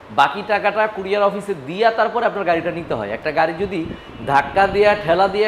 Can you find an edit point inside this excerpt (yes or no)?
no